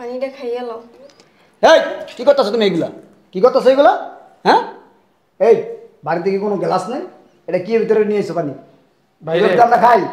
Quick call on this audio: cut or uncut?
uncut